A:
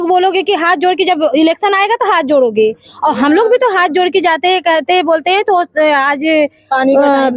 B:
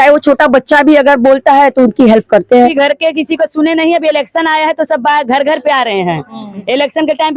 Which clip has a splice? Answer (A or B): B